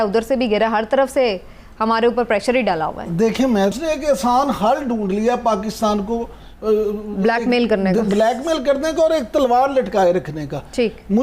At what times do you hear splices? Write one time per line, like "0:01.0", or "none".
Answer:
0:03.7